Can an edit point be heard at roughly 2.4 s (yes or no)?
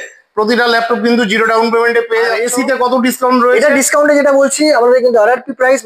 yes